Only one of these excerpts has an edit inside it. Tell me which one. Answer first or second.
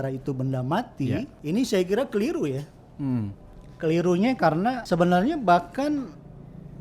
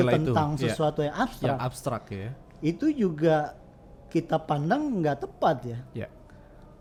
first